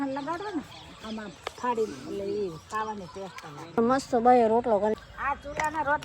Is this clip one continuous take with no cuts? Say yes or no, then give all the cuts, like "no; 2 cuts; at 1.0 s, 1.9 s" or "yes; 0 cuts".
no; 1 cut; at 4.9 s